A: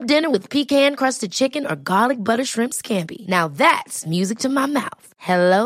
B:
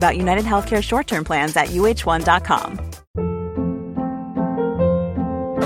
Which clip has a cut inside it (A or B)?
B